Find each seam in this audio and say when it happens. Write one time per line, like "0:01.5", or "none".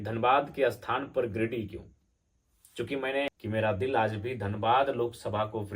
0:03.3